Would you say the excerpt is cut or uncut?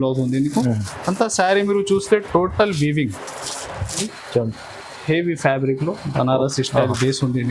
cut